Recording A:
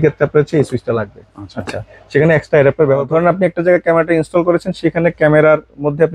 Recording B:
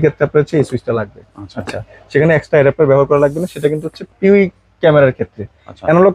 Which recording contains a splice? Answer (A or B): A